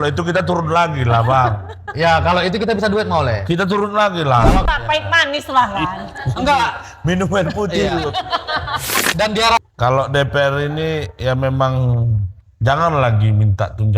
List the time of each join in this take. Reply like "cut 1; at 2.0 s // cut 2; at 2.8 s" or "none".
cut 1; at 4.6 s // cut 2; at 9.6 s

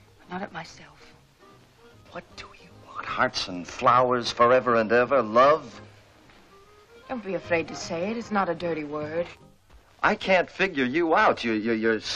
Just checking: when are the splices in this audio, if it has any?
cut 1; at 7.3 s

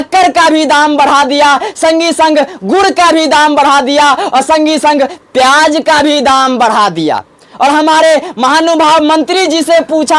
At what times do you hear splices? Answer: none

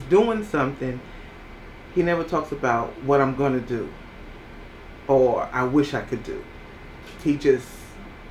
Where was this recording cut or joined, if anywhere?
none

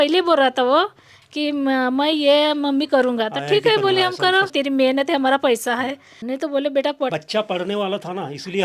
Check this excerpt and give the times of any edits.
cut 1; at 4.5 s // cut 2; at 6.1 s // cut 3; at 7.1 s

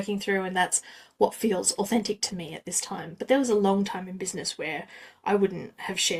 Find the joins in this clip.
none

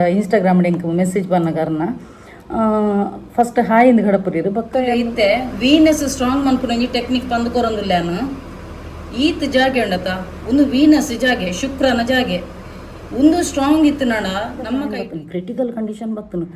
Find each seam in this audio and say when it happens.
cut 1; at 5.0 s // cut 2; at 14.9 s

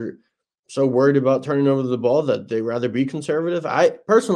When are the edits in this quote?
none

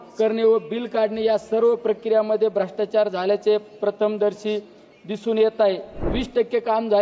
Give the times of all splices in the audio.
cut 1; at 6.1 s

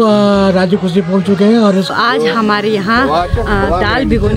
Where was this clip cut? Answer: cut 1; at 1.9 s

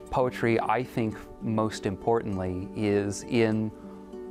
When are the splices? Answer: none

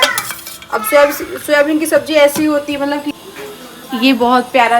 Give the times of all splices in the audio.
cut 1; at 3.2 s

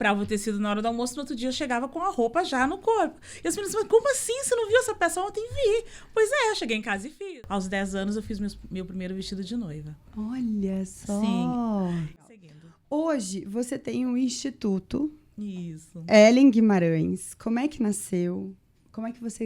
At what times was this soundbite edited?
cut 1; at 7.0 s // cut 2; at 12.2 s

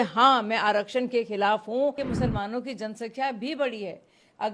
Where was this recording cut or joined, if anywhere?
cut 1; at 2.0 s

